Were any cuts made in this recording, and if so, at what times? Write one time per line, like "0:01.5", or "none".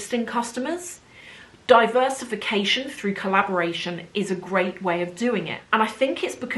0:05.6